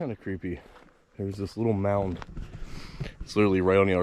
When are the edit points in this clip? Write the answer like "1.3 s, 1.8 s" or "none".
none